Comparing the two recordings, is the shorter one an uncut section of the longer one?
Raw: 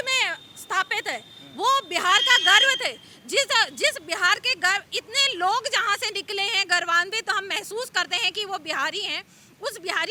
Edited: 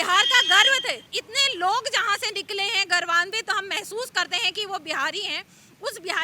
no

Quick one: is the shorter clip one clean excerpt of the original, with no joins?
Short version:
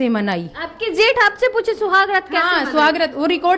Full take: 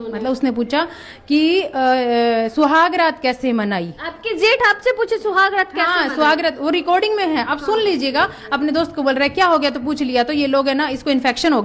yes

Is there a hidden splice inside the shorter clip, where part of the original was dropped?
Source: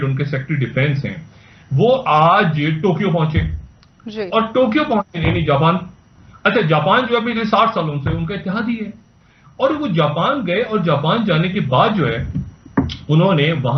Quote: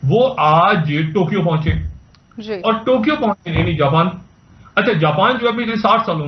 no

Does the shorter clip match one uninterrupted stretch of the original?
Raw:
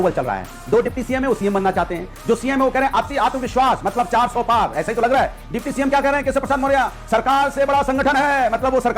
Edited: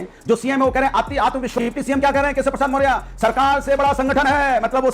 no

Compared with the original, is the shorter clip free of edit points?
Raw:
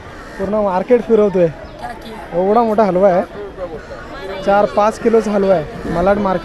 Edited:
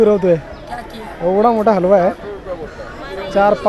yes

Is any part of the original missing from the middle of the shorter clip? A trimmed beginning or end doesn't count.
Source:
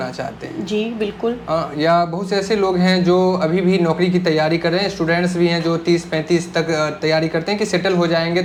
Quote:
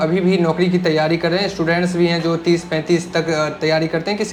no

